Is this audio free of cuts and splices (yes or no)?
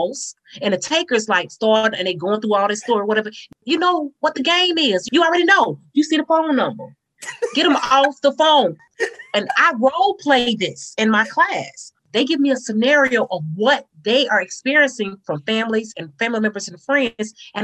no